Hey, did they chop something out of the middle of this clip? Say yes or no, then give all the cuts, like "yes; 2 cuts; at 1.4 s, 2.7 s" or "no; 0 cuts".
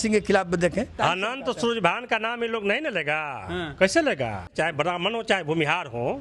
yes; 2 cuts; at 1.0 s, 4.5 s